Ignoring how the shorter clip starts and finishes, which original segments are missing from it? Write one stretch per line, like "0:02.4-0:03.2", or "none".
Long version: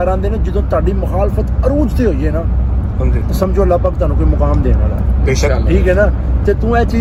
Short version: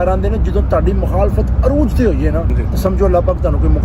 0:02.6-0:03.1